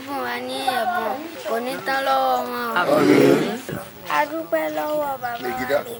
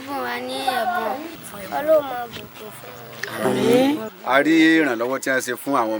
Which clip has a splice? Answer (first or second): second